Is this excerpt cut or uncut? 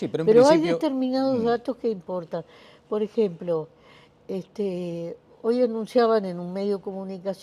cut